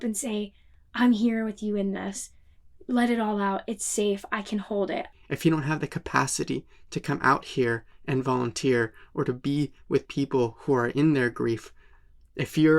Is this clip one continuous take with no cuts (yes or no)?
no